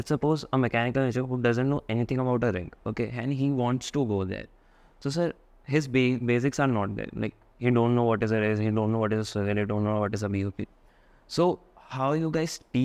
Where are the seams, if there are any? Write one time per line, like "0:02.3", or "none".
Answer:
none